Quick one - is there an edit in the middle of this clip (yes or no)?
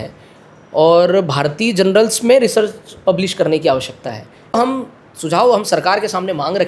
yes